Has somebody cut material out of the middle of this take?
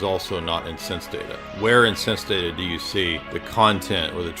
yes; 1 cut; at 3.3 s

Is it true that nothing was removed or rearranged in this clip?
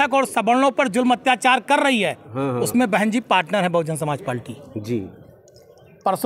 yes; 0 cuts

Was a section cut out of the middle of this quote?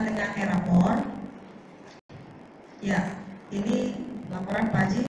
yes; 1 cut; at 4.2 s

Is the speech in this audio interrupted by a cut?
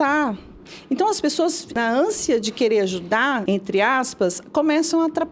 yes; 2 cuts; at 1.7 s, 3.4 s

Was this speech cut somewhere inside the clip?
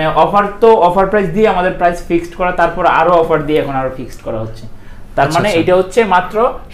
no; 0 cuts

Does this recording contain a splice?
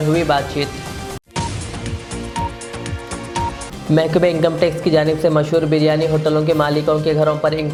no; 0 cuts

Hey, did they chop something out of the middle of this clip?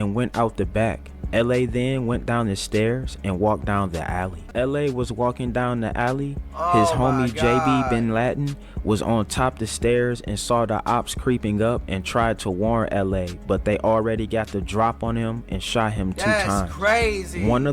yes; 1 cut; at 4.5 s

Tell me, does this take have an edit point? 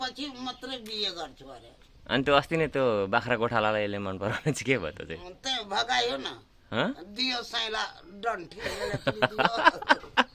no; 0 cuts

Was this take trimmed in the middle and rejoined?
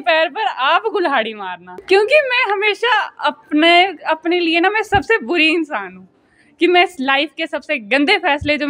yes; 1 cut; at 1.7 s

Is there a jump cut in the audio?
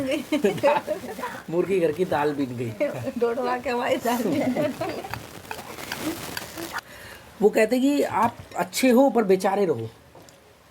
yes; 1 cut; at 6.8 s

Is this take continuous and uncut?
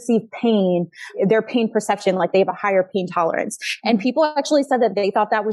yes; 0 cuts

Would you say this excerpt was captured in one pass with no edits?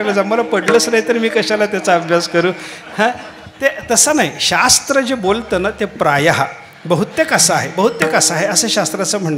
yes; 0 cuts

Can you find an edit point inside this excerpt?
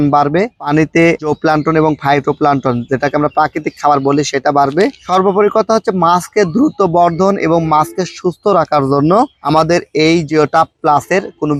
no; 0 cuts

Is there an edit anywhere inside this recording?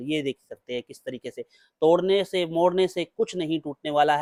no; 0 cuts

